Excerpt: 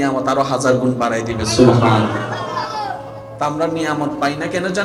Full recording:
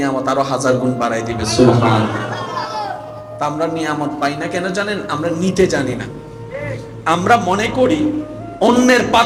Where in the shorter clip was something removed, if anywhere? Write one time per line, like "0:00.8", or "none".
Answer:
none